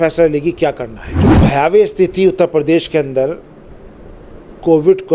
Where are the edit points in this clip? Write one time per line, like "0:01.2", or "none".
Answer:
0:01.4